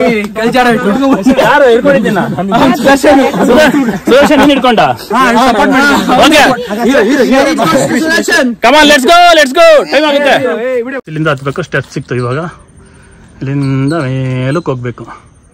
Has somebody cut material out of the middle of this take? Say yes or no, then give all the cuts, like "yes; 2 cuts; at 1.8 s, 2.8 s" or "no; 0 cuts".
no; 0 cuts